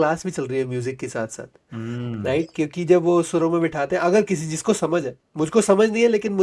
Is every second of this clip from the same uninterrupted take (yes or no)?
yes